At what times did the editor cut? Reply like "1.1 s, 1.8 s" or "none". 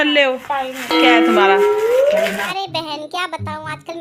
2.5 s